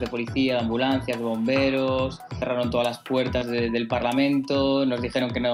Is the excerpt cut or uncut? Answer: uncut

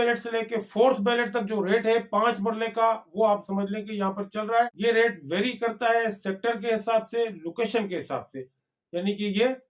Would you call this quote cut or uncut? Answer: cut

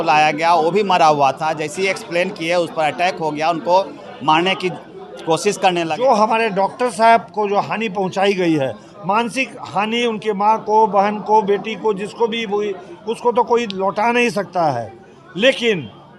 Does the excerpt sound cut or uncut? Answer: cut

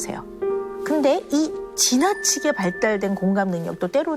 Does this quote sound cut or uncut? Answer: uncut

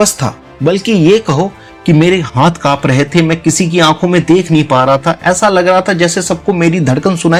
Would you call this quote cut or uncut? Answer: uncut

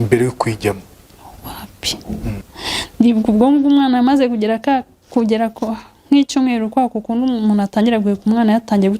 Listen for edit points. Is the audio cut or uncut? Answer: cut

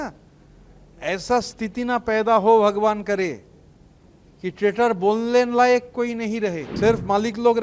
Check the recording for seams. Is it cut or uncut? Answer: cut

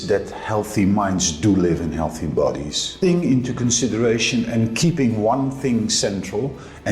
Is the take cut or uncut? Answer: cut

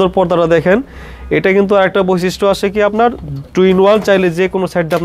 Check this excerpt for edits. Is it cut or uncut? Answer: uncut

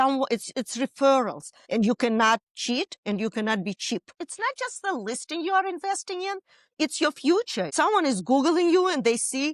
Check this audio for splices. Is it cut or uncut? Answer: cut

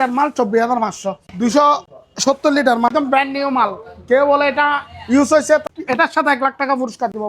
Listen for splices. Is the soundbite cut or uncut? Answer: cut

